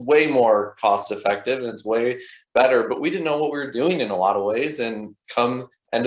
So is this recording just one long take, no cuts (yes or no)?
yes